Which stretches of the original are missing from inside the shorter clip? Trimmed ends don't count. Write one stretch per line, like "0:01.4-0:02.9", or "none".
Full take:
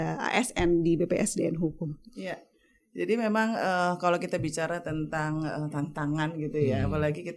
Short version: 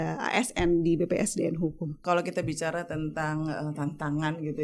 0:02.0-0:04.0